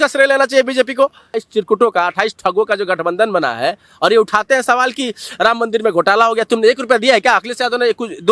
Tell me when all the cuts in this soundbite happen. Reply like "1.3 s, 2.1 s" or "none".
1.4 s